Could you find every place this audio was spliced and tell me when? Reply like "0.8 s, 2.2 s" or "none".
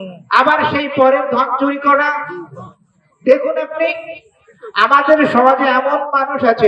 none